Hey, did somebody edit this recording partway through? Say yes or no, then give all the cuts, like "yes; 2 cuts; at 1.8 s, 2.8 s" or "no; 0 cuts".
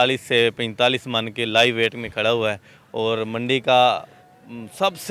no; 0 cuts